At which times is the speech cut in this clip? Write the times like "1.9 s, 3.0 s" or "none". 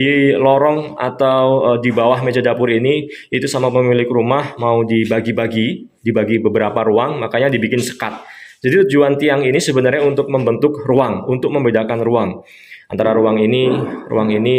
none